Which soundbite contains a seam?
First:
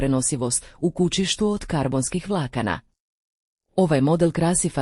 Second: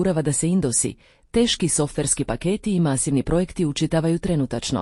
first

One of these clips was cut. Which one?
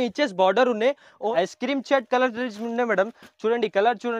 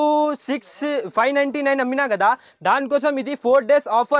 first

